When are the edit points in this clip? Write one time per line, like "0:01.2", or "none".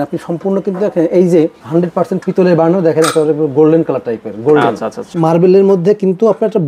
0:01.6
0:05.1